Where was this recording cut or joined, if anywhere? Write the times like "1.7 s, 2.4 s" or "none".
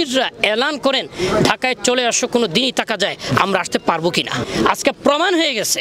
4.5 s